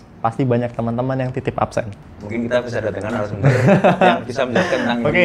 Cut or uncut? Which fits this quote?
cut